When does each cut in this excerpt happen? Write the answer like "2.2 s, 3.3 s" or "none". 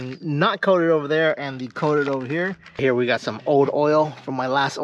2.8 s